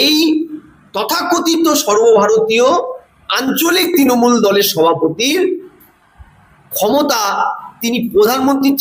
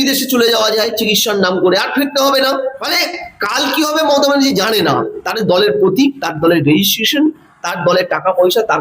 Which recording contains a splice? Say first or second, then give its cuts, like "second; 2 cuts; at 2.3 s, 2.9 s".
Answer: second; 1 cut; at 2.8 s